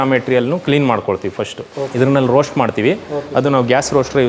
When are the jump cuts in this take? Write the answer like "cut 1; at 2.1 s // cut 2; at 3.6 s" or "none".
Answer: cut 1; at 1.9 s